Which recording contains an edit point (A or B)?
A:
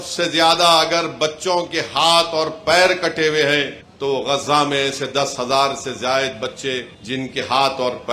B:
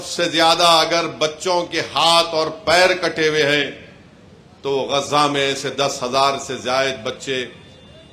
A